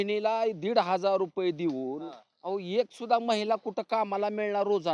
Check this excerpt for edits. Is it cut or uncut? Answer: uncut